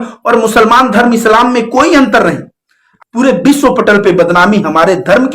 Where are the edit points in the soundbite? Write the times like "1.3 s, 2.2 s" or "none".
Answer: 2.9 s